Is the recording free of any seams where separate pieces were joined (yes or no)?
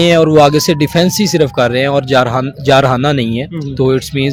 yes